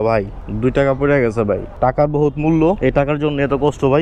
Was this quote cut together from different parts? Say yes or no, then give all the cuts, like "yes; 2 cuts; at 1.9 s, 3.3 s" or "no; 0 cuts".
no; 0 cuts